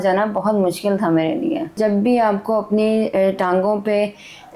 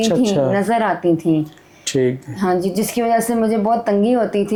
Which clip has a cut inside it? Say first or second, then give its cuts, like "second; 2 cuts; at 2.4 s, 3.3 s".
first; 1 cut; at 1.8 s